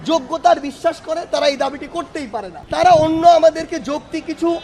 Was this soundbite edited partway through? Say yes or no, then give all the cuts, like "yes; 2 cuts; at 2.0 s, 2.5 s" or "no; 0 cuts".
yes; 1 cut; at 2.5 s